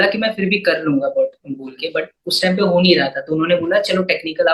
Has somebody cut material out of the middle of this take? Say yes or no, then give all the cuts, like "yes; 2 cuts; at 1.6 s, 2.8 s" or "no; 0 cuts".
no; 0 cuts